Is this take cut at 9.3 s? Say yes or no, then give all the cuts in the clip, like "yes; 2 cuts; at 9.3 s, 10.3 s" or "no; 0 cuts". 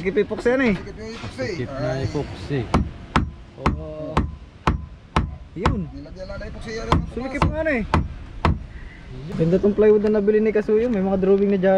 yes; 1 cut; at 9.3 s